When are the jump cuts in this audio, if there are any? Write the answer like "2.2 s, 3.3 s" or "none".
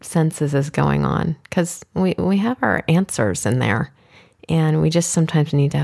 none